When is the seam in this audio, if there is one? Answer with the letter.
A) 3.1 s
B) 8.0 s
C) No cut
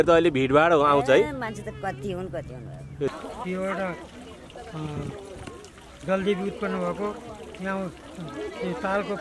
A